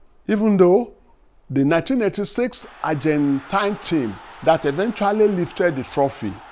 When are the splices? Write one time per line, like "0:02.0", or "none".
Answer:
none